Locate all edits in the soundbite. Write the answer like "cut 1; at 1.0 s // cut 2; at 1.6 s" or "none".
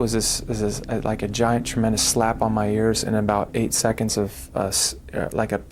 none